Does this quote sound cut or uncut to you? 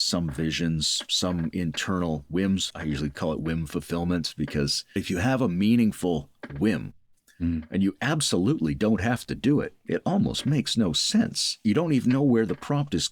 cut